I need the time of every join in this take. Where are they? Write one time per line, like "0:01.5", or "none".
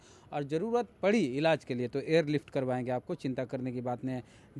none